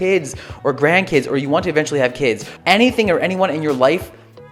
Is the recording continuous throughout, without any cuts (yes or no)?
no